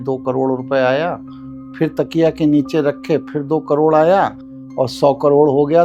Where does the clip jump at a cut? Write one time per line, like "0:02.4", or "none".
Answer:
none